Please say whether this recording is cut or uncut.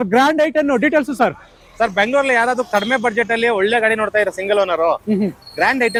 uncut